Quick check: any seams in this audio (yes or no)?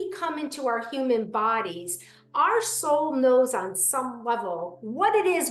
no